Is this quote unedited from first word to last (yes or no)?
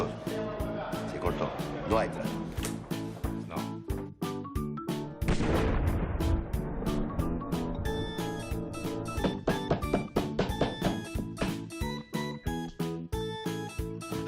no